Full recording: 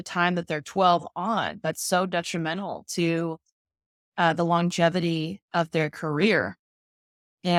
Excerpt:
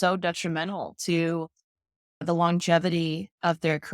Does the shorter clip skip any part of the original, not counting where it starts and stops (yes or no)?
yes